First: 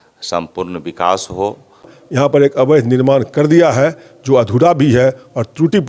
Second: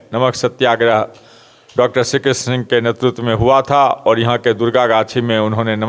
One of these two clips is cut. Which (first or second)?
first